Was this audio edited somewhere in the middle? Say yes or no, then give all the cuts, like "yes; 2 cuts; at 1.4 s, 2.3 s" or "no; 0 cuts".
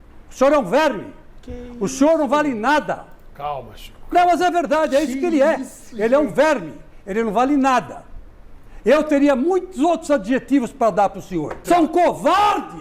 yes; 1 cut; at 11.6 s